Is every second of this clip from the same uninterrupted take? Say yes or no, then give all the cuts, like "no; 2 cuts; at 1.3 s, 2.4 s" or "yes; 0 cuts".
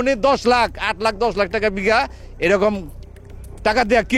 yes; 0 cuts